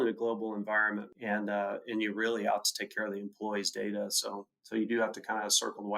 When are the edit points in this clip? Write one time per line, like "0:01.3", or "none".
0:01.1